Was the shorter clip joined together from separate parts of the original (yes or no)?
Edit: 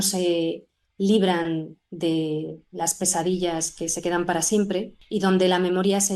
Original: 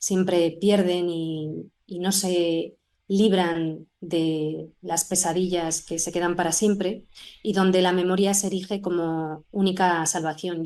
yes